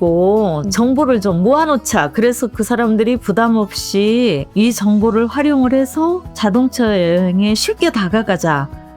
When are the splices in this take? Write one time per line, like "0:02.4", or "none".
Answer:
0:04.4
0:06.3